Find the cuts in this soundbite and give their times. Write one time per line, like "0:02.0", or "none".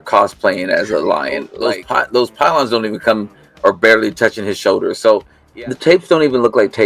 0:01.5
0:05.4